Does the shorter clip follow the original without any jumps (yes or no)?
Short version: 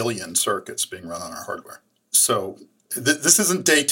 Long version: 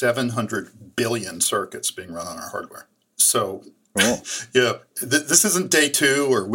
no